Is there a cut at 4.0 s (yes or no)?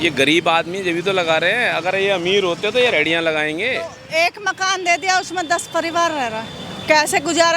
yes